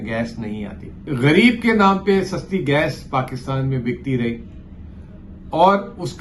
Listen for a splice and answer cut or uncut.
cut